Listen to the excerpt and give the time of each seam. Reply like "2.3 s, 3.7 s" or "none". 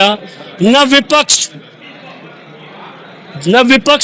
none